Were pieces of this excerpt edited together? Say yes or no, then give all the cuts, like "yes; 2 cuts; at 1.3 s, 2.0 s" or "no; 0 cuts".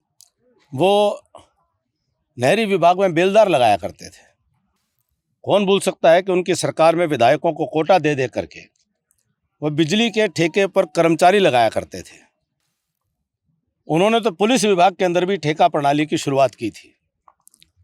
no; 0 cuts